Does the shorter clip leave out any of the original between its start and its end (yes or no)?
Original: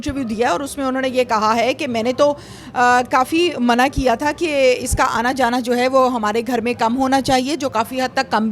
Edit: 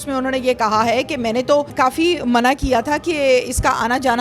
yes